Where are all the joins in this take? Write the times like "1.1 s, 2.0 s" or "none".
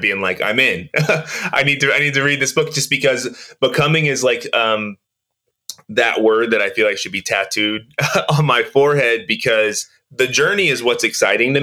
10.2 s